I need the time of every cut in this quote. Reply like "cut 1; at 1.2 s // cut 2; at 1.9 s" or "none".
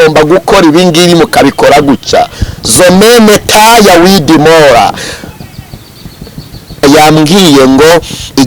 cut 1; at 6.8 s